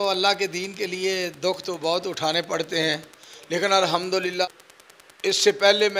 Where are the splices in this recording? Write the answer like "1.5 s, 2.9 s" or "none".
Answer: 4.4 s